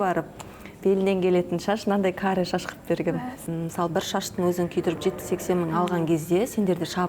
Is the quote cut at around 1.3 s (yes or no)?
no